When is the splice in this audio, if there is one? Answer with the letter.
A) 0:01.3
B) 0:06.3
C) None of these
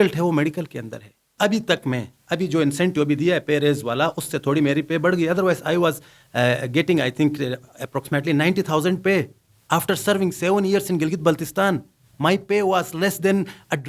A